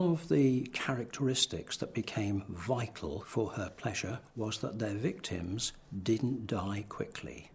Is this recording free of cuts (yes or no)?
no